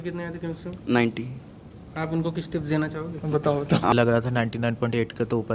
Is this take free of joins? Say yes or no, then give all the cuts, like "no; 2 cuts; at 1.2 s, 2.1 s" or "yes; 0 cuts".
no; 1 cut; at 3.9 s